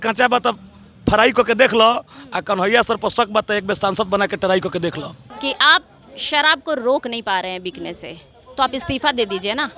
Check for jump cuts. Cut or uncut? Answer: cut